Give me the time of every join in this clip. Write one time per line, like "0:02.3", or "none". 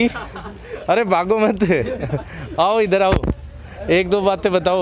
none